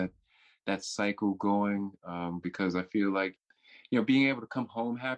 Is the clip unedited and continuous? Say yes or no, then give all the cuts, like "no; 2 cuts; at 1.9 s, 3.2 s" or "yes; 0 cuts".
no; 1 cut; at 3.4 s